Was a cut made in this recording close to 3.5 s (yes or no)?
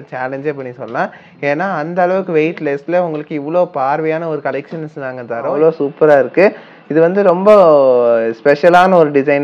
no